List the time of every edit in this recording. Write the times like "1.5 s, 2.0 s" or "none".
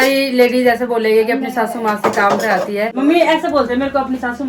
none